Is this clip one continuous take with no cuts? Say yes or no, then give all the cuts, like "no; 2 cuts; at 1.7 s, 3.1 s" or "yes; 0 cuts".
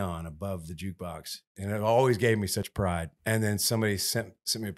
no; 1 cut; at 2.7 s